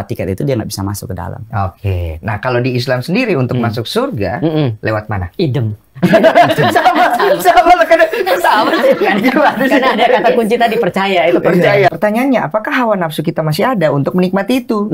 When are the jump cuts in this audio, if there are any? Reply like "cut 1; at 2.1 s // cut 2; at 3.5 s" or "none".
cut 1; at 11.9 s